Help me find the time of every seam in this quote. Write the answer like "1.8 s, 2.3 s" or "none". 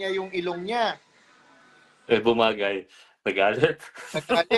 none